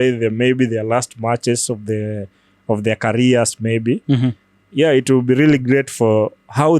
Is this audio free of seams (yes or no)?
yes